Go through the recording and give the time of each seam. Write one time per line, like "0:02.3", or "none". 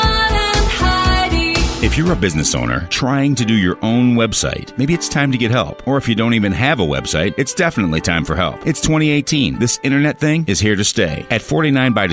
0:01.7